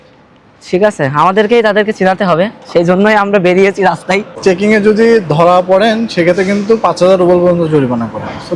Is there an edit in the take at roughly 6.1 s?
no; 1 cut; at 4.3 s

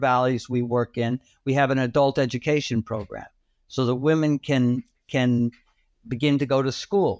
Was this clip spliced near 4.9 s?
no; 0 cuts

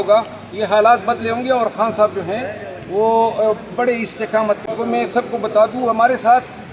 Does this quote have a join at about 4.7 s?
yes; 1 cut; at 4.7 s

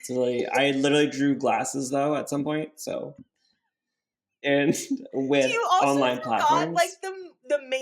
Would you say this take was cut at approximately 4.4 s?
yes; 1 cut; at 4.4 s

